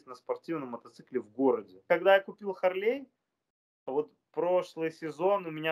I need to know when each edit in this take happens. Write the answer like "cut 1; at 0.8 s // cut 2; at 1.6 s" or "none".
cut 1; at 1.8 s